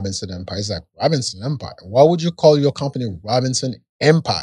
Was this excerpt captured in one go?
yes; 0 cuts

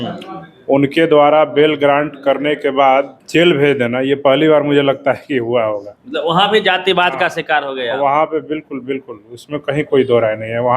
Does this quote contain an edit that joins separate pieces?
yes; 2 cuts; at 3.2 s, 5.9 s

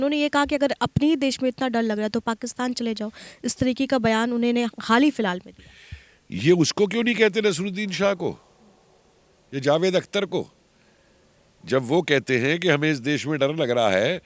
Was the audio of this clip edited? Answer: no; 0 cuts

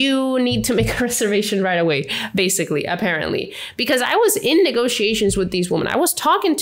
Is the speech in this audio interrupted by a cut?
no; 0 cuts

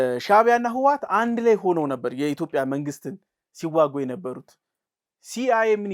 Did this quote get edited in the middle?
no; 0 cuts

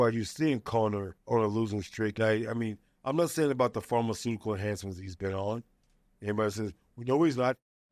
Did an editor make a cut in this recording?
yes; 2 cuts; at 1.1 s, 2.1 s

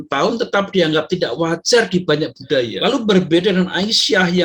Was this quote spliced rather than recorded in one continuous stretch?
yes; 1 cut; at 2.7 s

